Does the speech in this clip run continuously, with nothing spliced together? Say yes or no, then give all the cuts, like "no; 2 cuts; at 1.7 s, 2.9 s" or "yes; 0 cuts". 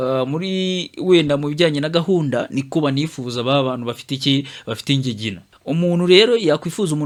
yes; 0 cuts